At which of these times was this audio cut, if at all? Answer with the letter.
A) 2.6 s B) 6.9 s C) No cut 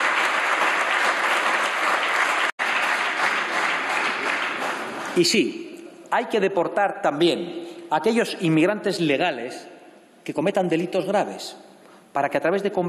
A